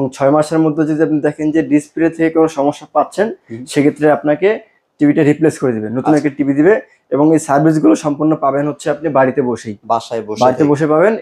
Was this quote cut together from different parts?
no; 0 cuts

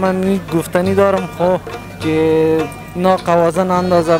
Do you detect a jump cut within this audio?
no; 0 cuts

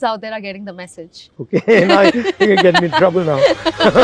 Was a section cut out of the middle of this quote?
no; 0 cuts

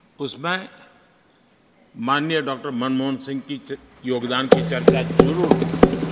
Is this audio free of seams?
yes; 0 cuts

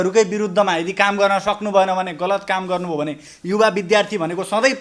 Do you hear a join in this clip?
no; 0 cuts

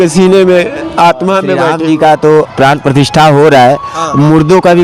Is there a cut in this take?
yes; 1 cut; at 1.7 s

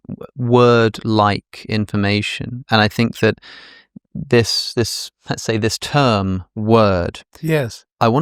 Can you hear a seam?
no; 0 cuts

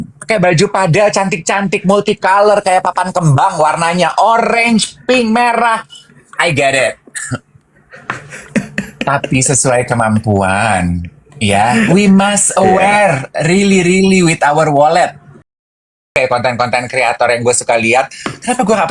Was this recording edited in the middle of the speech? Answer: yes; 1 cut; at 15.8 s

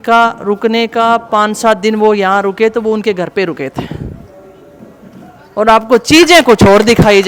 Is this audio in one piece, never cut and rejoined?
yes; 0 cuts

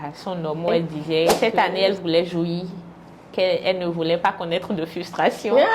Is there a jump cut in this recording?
yes; 1 cut; at 1.3 s

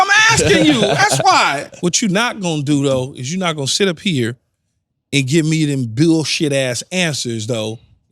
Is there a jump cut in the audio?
yes; 1 cut; at 1.7 s

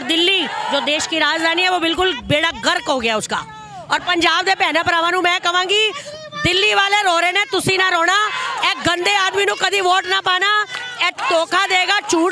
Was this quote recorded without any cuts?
yes; 0 cuts

